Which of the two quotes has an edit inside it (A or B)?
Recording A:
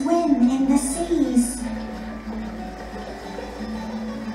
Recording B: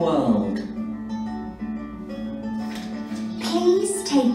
B